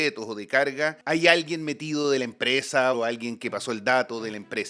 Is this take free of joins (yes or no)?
no